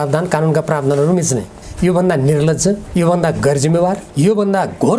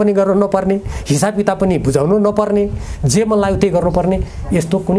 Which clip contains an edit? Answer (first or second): first